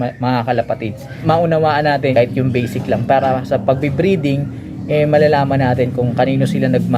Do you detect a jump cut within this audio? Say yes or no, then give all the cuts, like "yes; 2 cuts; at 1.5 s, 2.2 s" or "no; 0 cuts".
yes; 2 cuts; at 1.0 s, 2.1 s